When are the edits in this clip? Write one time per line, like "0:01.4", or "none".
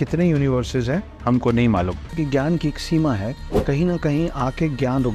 0:02.0